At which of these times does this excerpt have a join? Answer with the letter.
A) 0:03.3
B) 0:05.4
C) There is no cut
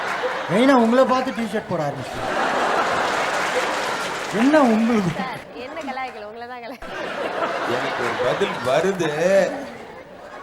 C